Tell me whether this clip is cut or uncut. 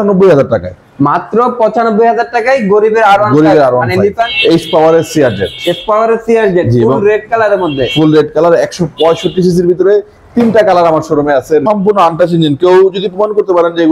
cut